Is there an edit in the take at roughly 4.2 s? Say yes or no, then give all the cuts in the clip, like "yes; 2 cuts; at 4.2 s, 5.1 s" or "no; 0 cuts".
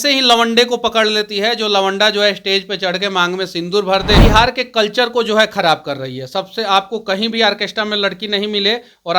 yes; 1 cut; at 4.2 s